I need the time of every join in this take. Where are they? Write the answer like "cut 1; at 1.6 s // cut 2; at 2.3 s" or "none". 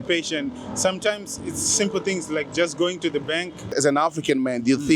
cut 1; at 3.6 s